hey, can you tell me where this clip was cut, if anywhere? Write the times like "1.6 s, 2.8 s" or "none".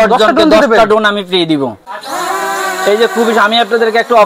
1.8 s